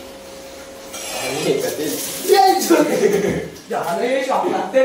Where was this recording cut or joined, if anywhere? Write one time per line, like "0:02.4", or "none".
none